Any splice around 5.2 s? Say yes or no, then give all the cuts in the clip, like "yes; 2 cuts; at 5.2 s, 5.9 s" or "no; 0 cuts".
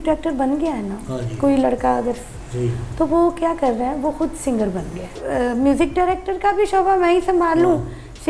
yes; 1 cut; at 5.2 s